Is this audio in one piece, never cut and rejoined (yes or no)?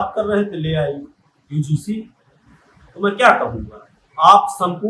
yes